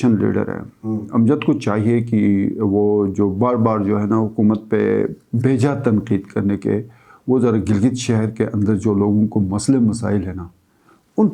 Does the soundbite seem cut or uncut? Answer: uncut